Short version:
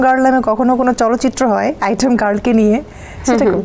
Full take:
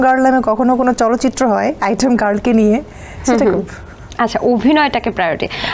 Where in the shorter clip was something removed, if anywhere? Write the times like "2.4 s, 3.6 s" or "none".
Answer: none